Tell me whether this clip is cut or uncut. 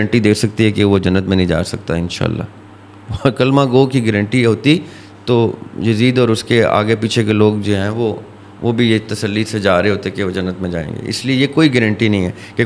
uncut